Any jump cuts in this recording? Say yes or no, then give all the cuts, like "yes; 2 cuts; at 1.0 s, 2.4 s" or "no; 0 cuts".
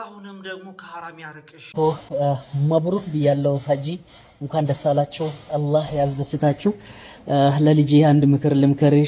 yes; 1 cut; at 2.0 s